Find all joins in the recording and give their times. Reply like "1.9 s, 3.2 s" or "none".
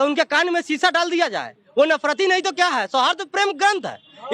none